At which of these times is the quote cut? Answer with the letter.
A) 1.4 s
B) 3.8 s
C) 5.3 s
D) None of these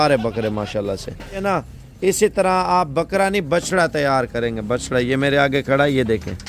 A